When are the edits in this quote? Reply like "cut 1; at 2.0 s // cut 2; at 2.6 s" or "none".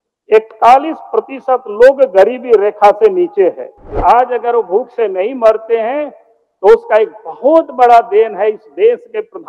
cut 1; at 4.0 s

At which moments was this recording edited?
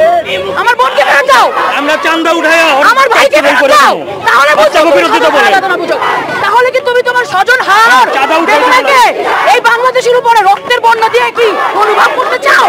none

